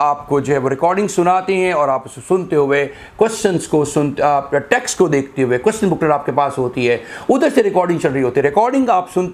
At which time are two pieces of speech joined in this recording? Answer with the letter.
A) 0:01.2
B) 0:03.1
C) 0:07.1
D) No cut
D